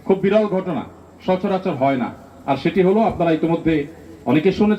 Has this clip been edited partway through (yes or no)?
no